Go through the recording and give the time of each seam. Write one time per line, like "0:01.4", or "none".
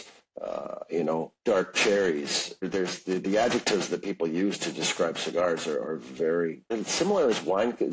0:02.7
0:06.6